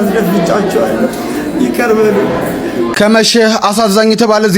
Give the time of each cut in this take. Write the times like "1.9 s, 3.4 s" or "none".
2.9 s